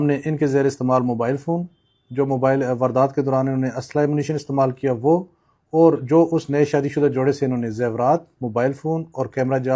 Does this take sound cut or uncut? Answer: uncut